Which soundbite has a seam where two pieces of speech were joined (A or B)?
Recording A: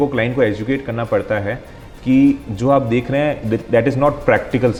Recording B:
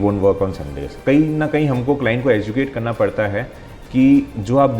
B